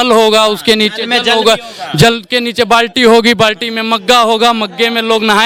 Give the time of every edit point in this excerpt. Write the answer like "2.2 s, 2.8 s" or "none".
none